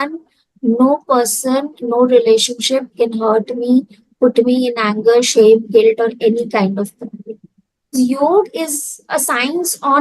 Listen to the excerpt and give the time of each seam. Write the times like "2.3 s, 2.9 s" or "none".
7.9 s